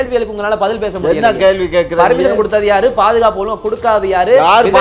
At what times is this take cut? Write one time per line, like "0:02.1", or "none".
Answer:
none